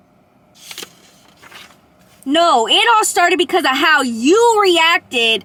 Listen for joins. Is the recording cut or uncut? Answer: uncut